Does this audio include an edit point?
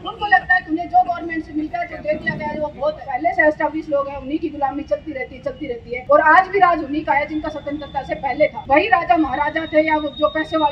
yes; 3 cuts; at 3.1 s, 5.9 s, 8.6 s

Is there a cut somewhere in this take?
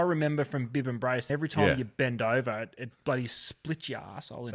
yes; 1 cut; at 1.2 s

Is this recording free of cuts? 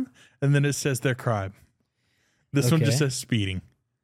yes; 0 cuts

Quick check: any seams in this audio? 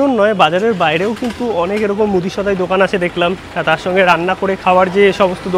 no; 0 cuts

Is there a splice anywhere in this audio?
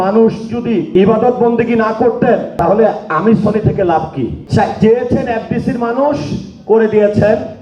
yes; 3 cuts; at 0.9 s, 2.5 s, 4.4 s

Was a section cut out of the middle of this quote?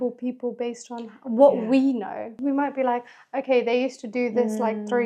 yes; 1 cut; at 2.3 s

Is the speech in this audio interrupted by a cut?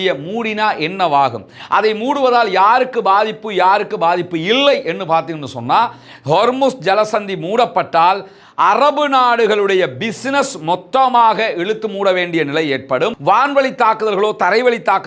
yes; 1 cut; at 13.2 s

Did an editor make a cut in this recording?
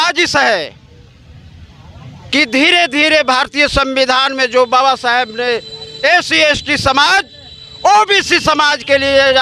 no; 0 cuts

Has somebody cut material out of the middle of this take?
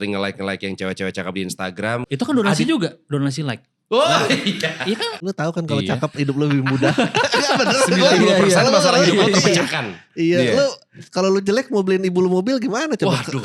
yes; 2 cuts; at 2.0 s, 5.2 s

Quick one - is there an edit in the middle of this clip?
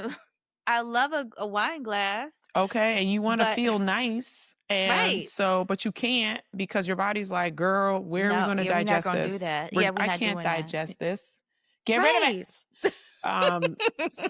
no; 0 cuts

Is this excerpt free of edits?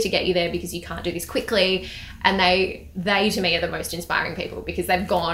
yes; 0 cuts

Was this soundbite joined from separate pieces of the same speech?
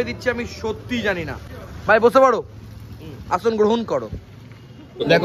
no; 0 cuts

